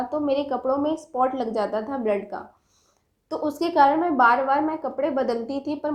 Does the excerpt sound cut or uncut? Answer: uncut